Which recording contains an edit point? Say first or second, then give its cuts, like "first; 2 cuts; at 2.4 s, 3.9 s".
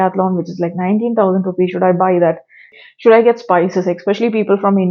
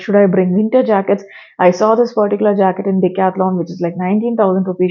first; 1 cut; at 2.7 s